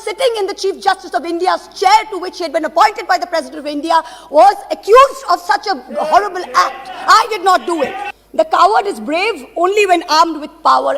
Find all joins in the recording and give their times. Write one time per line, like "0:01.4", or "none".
0:08.1